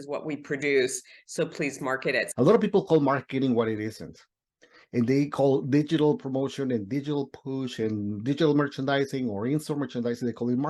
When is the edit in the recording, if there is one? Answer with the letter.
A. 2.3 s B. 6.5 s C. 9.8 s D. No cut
A